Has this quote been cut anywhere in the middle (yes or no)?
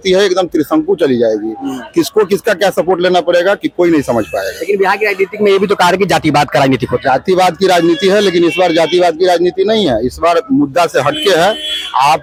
no